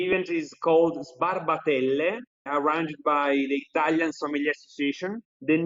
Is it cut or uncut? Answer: uncut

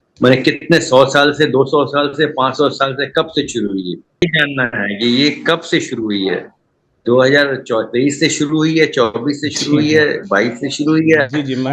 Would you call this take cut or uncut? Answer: cut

